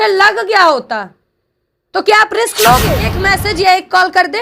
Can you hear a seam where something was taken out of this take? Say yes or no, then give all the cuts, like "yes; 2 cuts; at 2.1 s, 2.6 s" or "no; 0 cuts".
yes; 1 cut; at 3.2 s